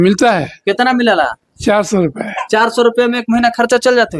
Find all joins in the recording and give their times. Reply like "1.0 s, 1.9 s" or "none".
none